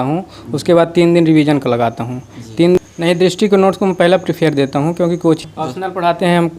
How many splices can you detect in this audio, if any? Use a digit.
2